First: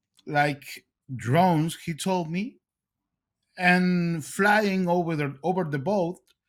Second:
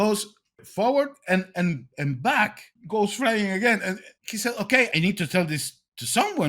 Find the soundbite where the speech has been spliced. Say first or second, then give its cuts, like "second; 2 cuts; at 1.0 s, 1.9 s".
second; 3 cuts; at 2.7 s, 4.1 s, 4.9 s